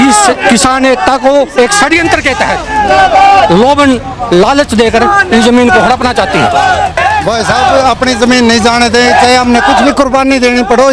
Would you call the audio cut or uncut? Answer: cut